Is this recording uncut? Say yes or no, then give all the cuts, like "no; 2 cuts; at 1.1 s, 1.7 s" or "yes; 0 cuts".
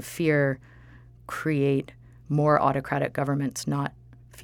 yes; 0 cuts